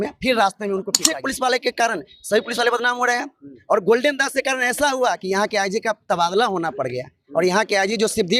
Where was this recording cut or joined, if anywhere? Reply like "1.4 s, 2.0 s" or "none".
1.1 s